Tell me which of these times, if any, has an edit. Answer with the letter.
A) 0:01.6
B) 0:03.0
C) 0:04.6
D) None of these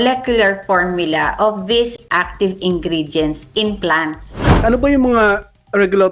C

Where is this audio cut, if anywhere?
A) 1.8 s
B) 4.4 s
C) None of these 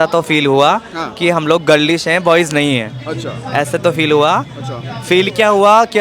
C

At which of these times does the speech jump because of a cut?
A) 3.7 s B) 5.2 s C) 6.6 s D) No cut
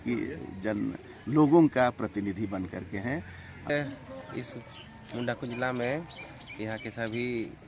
A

